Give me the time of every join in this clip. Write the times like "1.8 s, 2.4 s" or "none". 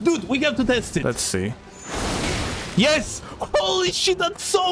1.0 s